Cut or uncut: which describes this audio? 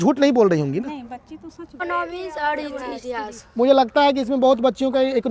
cut